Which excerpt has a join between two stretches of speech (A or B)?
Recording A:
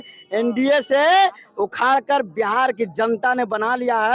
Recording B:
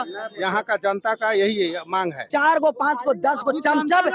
B